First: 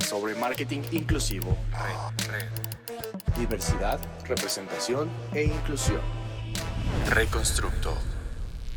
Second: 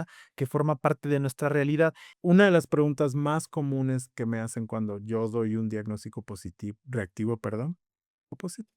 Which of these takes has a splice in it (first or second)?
second